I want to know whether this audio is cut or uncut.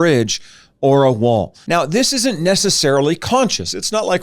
cut